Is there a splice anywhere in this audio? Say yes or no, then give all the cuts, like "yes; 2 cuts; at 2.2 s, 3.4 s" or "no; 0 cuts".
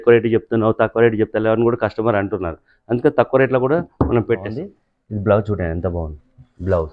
yes; 1 cut; at 4.6 s